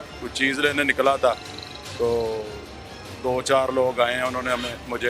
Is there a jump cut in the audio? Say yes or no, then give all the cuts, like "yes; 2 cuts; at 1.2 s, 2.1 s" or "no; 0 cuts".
no; 0 cuts